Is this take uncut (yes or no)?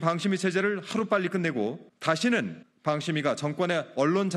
no